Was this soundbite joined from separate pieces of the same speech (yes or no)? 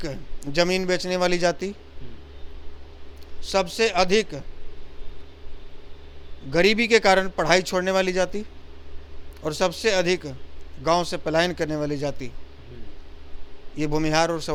no